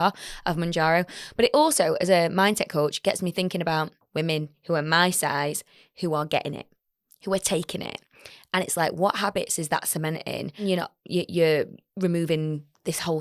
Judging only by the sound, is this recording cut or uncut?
cut